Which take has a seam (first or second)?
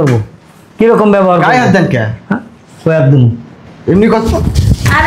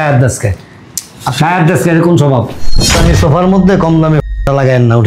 second